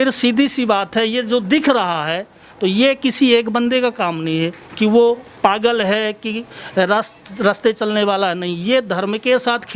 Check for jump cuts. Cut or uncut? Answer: uncut